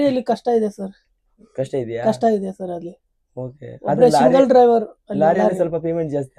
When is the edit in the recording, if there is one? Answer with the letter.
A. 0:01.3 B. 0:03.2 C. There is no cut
C